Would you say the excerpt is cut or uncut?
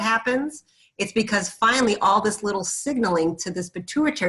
uncut